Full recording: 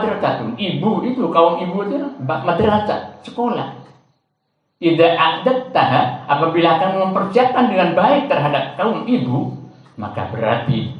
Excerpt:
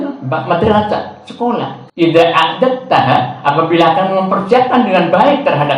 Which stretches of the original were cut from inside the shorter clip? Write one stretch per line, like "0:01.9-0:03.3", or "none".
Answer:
0:03.8-0:04.6